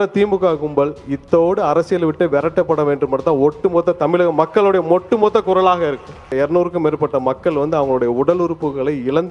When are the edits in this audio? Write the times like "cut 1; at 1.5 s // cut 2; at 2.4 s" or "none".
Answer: cut 1; at 6.3 s

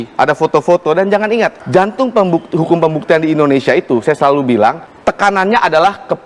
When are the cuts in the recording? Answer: cut 1; at 1.6 s // cut 2; at 4.9 s

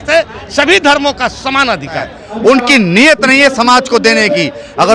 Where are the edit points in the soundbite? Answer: cut 1; at 2.2 s

